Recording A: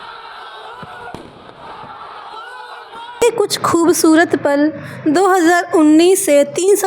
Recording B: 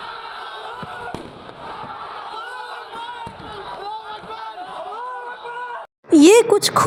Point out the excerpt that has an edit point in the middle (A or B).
A